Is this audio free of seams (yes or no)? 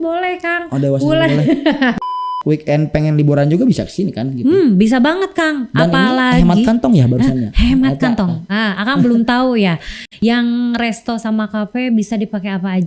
no